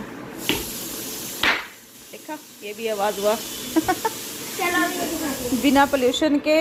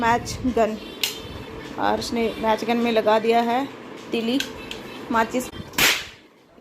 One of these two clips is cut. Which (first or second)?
second